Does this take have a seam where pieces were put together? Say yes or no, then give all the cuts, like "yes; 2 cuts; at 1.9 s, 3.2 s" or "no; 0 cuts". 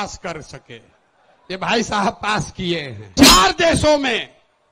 yes; 1 cut; at 3.2 s